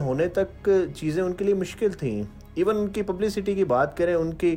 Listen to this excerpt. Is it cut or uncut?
uncut